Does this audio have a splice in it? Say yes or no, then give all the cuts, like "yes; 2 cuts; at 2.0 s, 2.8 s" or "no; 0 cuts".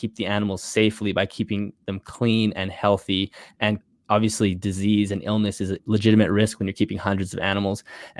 yes; 2 cuts; at 3.9 s, 5.8 s